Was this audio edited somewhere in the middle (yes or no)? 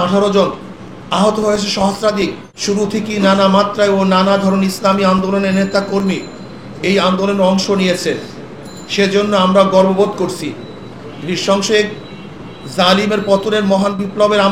yes